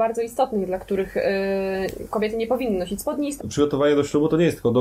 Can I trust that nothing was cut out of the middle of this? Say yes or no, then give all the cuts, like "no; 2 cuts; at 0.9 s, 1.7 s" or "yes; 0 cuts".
no; 1 cut; at 3.3 s